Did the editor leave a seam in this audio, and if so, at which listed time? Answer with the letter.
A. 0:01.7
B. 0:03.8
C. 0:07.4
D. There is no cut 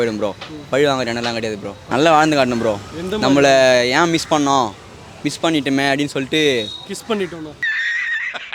D